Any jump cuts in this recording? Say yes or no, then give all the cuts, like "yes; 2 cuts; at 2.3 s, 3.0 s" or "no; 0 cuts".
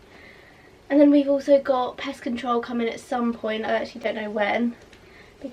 no; 0 cuts